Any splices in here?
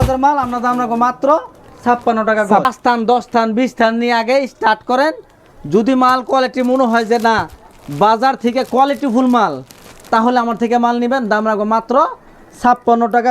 yes; 1 cut; at 2.7 s

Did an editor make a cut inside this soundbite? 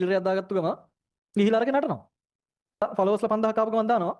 yes; 1 cut; at 2.8 s

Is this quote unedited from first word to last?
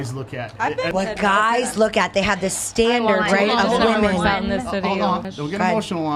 no; 2 cuts; at 0.9 s, 5.3 s

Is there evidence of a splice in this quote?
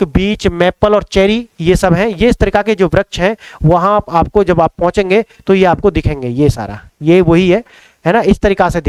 no; 0 cuts

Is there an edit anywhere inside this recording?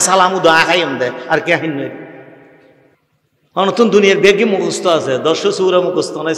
yes; 1 cut; at 2.8 s

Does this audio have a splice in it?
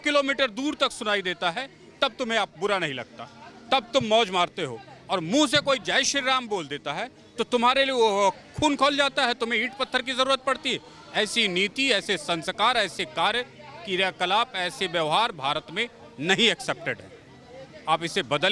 no; 0 cuts

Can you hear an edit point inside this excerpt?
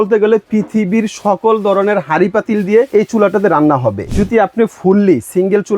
yes; 2 cuts; at 2.9 s, 4.1 s

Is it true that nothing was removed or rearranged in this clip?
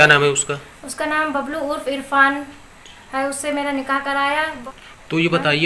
no; 1 cut; at 4.6 s

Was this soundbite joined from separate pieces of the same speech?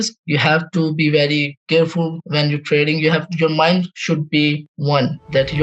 no; 0 cuts

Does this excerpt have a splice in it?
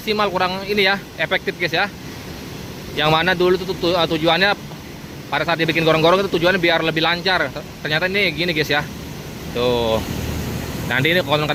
no; 0 cuts

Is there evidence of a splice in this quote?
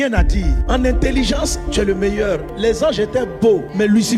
no; 0 cuts

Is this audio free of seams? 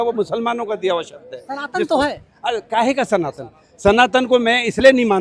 yes; 0 cuts

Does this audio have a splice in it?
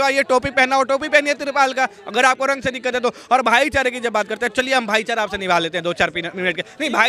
no; 0 cuts

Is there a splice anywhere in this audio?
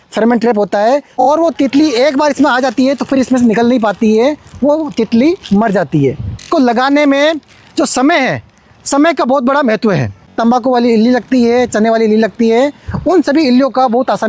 yes; 3 cuts; at 1.1 s, 6.5 s, 10.3 s

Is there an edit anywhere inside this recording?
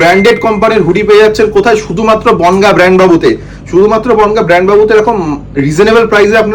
no; 0 cuts

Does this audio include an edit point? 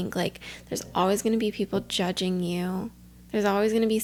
no; 0 cuts

